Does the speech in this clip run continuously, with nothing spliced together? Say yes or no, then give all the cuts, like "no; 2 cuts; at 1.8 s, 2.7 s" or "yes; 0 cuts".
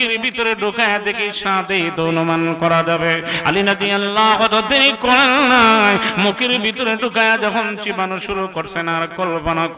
yes; 0 cuts